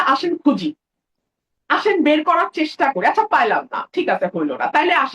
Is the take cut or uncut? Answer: uncut